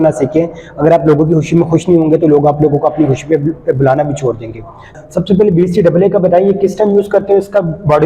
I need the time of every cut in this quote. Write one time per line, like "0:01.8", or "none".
0:04.9